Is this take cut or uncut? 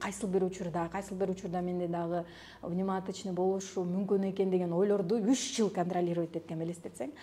uncut